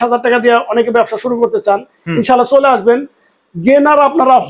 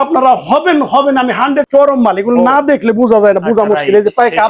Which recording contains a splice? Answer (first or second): second